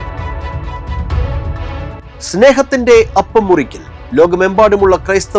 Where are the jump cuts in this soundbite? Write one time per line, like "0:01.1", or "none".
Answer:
none